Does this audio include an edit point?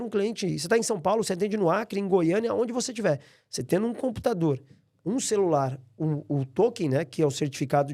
no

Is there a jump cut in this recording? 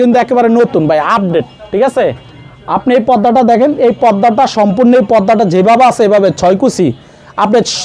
no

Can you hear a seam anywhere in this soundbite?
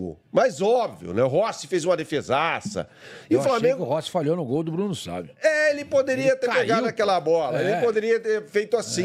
no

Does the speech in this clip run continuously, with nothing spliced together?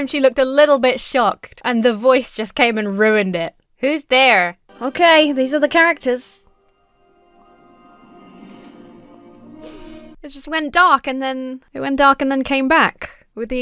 no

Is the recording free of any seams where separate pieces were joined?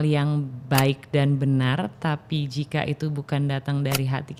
yes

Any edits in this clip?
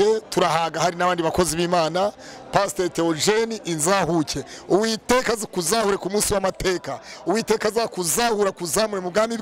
no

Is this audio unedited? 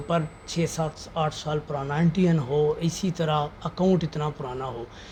yes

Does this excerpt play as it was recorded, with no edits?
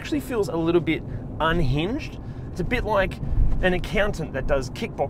yes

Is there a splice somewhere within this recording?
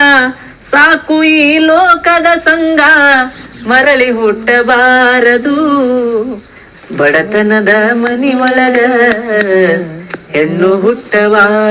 yes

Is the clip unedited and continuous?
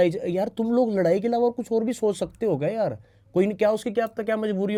yes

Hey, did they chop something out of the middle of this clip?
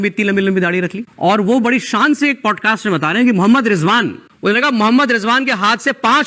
yes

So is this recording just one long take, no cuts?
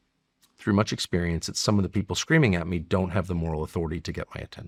yes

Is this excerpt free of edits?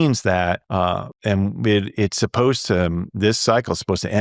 no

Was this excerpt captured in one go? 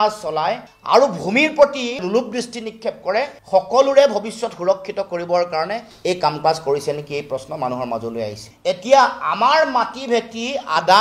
no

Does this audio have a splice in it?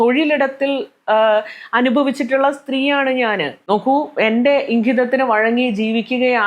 yes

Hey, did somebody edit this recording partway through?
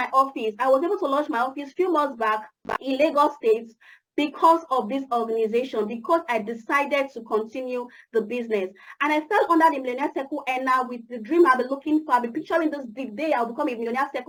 no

